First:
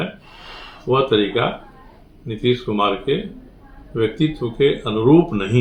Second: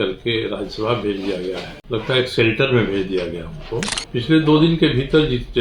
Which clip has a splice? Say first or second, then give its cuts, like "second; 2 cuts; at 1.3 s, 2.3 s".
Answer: second; 2 cuts; at 1.7 s, 4.0 s